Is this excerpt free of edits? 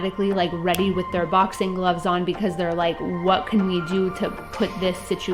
yes; 0 cuts

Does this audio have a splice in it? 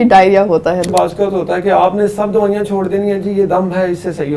yes; 1 cut; at 0.9 s

